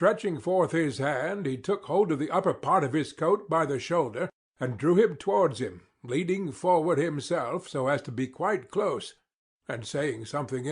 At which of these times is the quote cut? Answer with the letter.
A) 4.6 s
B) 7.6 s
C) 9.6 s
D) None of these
B